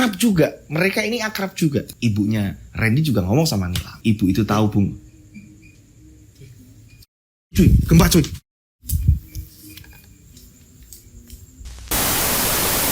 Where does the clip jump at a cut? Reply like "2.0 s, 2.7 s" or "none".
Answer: 11.7 s